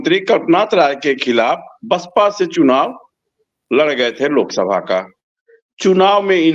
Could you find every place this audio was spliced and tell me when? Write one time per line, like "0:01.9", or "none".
none